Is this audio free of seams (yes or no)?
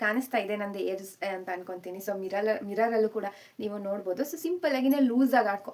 yes